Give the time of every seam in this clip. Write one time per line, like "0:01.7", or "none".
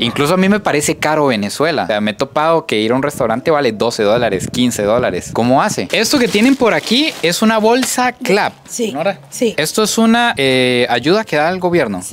0:05.8